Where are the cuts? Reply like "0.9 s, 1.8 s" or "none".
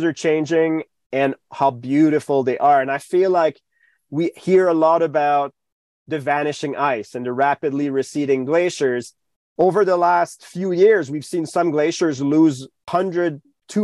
9.1 s, 12.9 s